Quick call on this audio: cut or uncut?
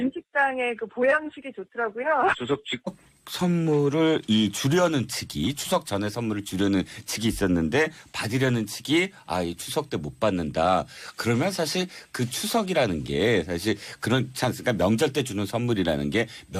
uncut